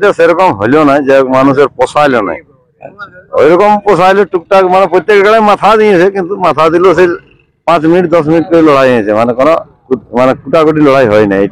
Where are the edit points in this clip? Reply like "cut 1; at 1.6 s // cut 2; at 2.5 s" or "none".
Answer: none